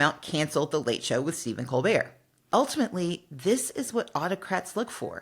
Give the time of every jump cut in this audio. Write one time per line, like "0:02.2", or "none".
0:02.5

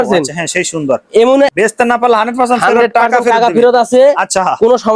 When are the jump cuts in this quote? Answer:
0:01.5

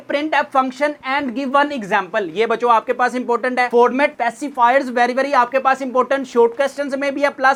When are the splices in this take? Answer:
none

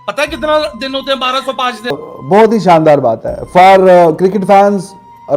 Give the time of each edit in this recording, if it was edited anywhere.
0:01.9

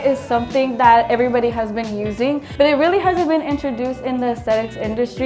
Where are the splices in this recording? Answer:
none

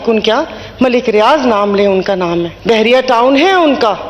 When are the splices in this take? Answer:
0:02.5

